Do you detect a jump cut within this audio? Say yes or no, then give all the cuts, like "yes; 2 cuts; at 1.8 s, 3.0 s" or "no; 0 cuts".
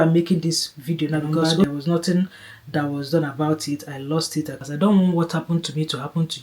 yes; 2 cuts; at 1.6 s, 4.5 s